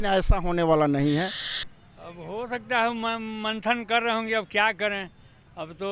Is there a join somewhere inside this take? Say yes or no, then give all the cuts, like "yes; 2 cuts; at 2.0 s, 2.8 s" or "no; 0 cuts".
yes; 1 cut; at 1.4 s